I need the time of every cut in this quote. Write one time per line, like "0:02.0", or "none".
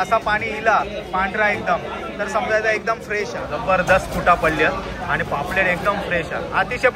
0:03.5